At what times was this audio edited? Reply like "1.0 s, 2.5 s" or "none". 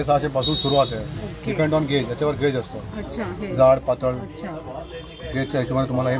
none